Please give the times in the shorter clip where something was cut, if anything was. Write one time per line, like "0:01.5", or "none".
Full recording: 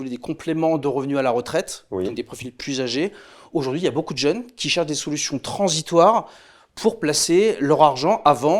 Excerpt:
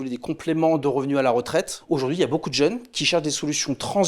0:01.8